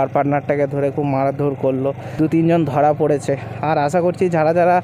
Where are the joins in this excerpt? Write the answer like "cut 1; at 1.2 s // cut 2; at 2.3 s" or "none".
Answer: cut 1; at 2.0 s